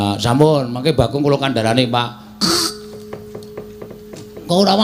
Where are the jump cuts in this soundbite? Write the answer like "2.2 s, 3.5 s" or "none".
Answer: 3.9 s